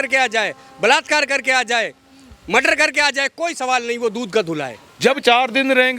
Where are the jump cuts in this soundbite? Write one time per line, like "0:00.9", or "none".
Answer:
0:04.8

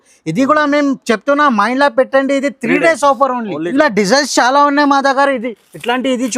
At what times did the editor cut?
0:03.6

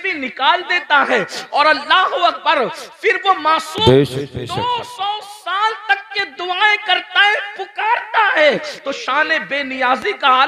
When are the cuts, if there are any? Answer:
none

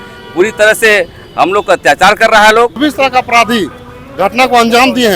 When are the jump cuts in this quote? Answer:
0:02.8

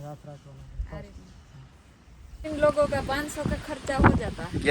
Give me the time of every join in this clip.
0:02.4

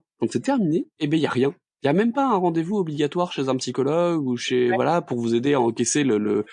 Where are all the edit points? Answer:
none

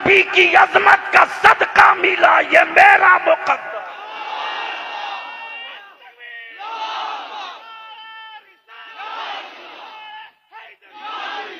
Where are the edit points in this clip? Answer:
none

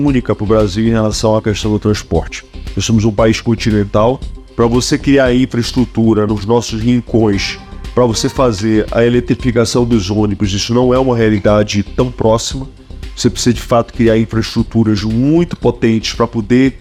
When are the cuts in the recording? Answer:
none

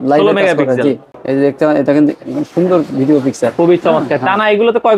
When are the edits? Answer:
0:01.1

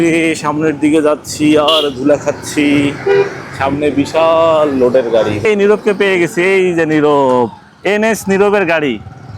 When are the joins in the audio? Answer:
0:05.4

